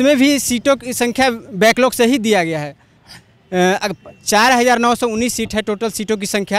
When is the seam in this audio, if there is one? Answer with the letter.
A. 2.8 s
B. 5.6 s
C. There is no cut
C